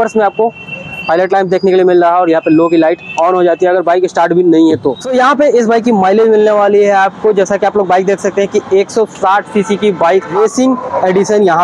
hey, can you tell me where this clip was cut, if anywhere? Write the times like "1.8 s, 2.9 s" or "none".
5.0 s, 10.4 s